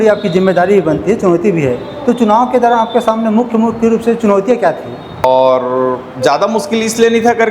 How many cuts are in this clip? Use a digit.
1